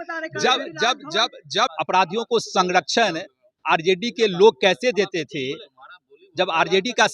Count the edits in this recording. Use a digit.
1